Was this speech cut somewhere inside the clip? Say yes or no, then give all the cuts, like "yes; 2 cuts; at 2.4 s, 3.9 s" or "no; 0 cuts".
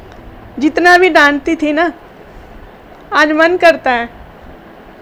no; 0 cuts